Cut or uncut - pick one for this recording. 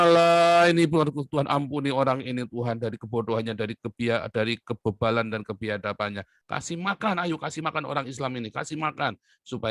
cut